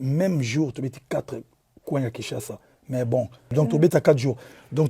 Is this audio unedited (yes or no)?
no